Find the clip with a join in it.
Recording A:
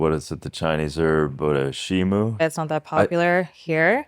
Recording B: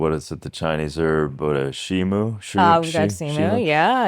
A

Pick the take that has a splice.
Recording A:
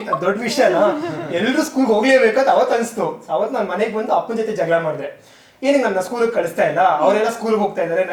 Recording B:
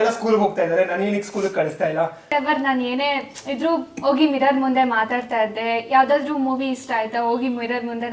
B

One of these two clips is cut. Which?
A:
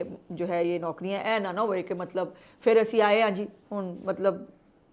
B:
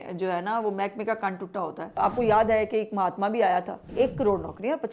B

